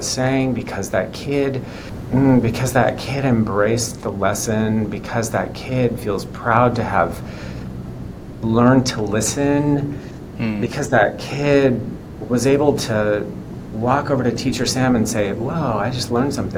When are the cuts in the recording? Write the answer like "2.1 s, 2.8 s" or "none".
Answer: 1.9 s

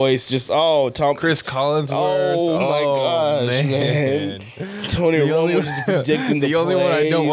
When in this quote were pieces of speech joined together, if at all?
none

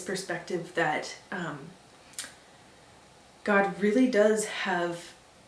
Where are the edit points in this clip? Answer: none

